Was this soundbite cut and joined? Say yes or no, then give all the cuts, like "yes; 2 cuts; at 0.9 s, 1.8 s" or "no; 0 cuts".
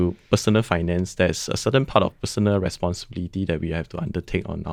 no; 0 cuts